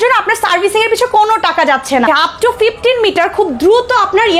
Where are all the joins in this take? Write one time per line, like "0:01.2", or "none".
0:02.1